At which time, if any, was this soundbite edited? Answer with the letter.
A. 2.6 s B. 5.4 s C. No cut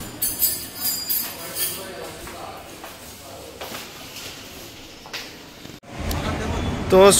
C